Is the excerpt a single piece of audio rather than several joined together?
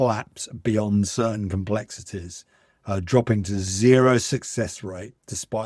yes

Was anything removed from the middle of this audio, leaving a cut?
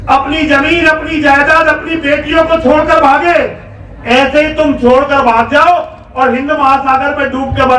no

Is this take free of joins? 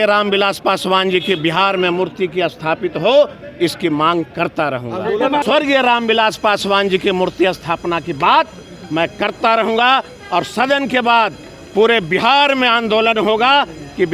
no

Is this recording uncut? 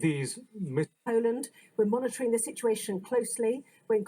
no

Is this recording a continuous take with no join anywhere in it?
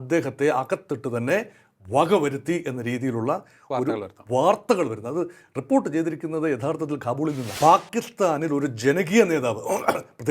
no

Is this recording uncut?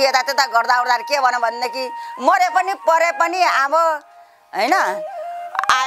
yes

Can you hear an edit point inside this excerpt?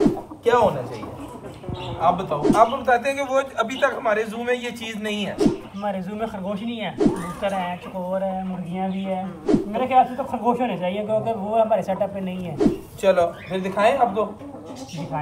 yes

